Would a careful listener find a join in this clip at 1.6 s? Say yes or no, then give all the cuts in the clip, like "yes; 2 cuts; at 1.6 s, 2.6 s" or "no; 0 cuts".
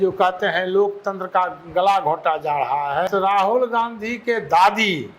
no; 1 cut; at 3.1 s